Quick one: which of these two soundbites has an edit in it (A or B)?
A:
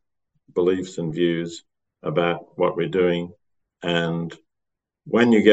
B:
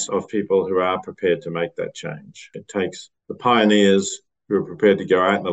B